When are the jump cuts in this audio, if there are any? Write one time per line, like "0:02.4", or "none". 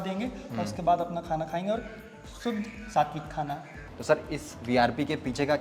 0:03.6